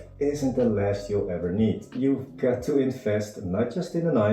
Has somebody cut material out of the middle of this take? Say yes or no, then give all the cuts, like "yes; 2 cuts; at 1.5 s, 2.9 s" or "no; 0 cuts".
yes; 1 cut; at 1.9 s